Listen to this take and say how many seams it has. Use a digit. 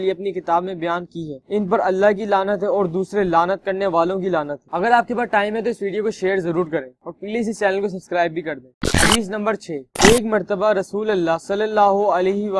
0